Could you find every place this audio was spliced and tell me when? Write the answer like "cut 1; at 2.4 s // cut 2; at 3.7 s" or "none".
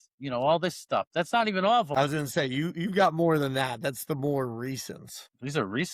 cut 1; at 1.9 s